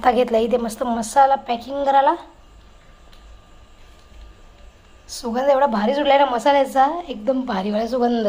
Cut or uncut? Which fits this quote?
uncut